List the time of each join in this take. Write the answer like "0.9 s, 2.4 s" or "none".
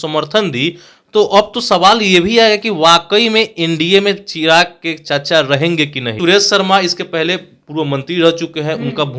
6.0 s